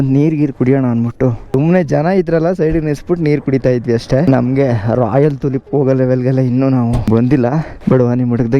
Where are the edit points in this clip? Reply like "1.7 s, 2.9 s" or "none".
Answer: 1.5 s, 7.8 s